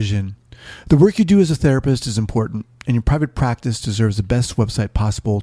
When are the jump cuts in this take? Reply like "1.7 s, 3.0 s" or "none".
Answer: none